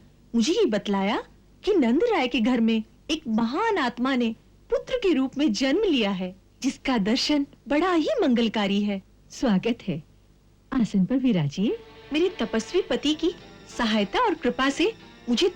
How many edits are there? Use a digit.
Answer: 2